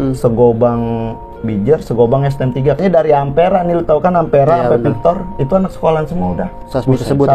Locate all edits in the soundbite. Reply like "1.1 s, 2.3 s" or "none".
2.8 s